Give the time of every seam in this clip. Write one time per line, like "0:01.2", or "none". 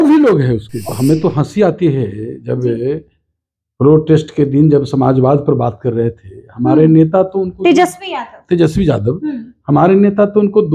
0:00.9